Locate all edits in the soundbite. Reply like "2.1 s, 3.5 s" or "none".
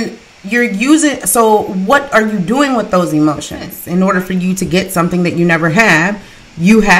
3.8 s